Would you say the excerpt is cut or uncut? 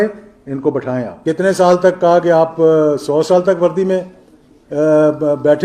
cut